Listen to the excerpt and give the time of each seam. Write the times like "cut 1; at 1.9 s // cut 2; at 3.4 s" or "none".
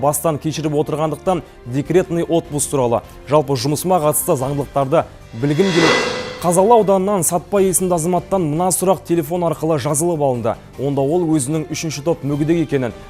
cut 1; at 6.0 s